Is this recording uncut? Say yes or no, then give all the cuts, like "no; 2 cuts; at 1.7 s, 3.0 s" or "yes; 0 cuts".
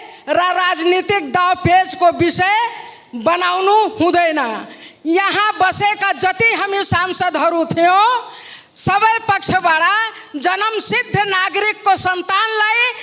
yes; 0 cuts